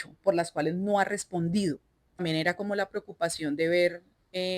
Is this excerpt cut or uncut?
cut